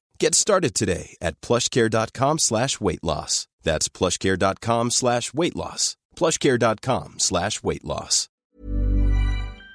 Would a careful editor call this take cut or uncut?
cut